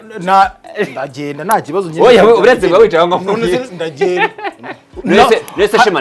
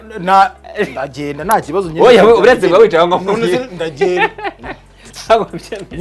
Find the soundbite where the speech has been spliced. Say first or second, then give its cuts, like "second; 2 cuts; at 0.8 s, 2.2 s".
first; 1 cut; at 4.9 s